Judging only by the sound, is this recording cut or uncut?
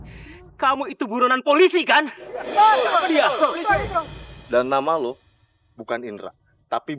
uncut